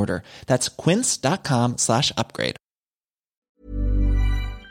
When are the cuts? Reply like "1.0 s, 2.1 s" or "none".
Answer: 3.4 s